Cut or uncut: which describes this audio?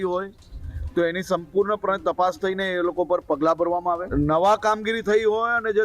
cut